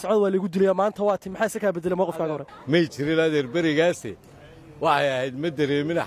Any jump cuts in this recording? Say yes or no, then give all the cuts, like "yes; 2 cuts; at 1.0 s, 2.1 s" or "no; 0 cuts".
yes; 1 cut; at 2.5 s